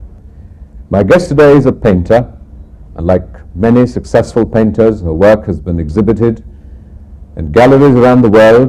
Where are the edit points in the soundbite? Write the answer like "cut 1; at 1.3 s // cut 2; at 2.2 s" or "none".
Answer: cut 1; at 4.0 s